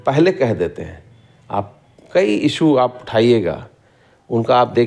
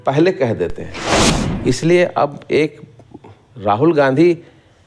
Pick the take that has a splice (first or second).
second